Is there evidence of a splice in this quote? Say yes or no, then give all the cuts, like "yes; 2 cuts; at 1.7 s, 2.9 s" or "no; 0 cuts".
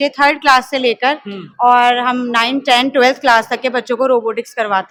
no; 0 cuts